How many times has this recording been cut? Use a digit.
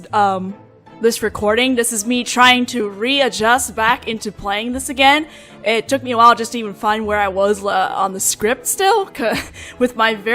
1